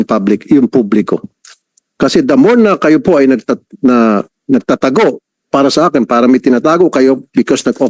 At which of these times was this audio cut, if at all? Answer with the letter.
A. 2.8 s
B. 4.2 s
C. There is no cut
C